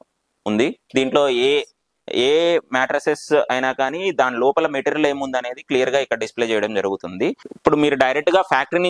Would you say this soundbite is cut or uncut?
cut